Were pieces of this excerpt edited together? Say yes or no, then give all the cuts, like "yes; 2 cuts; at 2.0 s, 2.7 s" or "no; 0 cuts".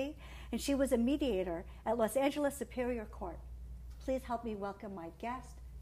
yes; 1 cut; at 3.3 s